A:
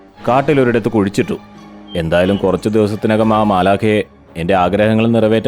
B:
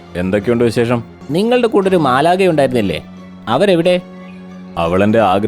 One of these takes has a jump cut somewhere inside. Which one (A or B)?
B